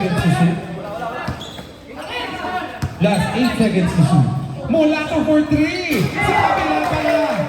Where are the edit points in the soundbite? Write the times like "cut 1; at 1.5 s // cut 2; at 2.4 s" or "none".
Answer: none